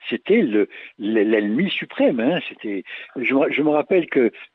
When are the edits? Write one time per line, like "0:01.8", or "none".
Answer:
none

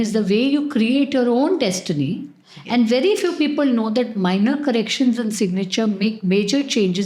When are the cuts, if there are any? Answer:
none

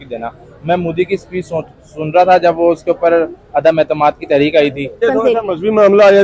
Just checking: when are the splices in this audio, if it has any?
0:05.0

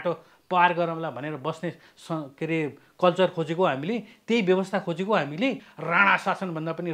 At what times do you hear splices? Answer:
0:05.7

